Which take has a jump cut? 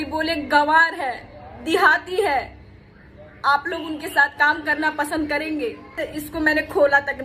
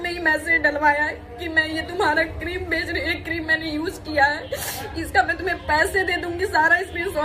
first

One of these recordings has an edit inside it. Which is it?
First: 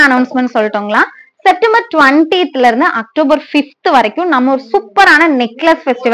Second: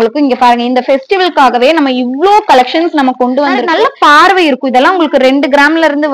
second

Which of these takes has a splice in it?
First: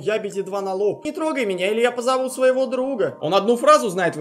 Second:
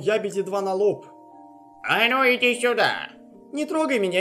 first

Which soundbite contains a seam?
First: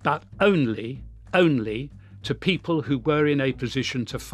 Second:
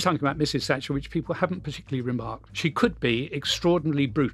second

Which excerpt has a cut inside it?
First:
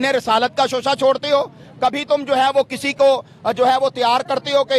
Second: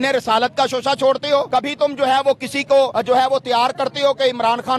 second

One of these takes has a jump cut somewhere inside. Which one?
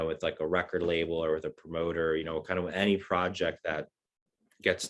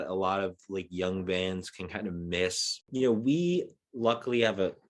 second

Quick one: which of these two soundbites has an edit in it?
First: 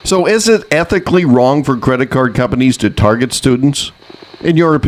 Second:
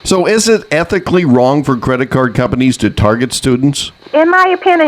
second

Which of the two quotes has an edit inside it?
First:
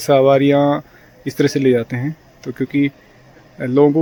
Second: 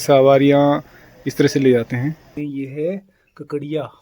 second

